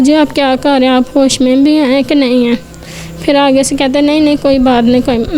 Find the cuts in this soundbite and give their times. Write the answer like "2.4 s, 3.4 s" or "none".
none